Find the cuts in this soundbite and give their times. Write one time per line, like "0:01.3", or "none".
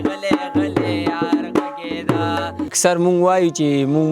0:02.7